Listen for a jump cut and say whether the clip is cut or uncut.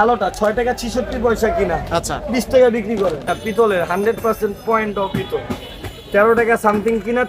cut